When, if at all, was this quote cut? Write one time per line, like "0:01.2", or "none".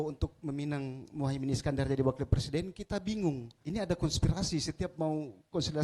0:03.5